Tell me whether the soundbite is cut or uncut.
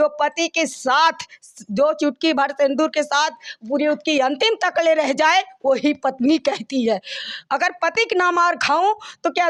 uncut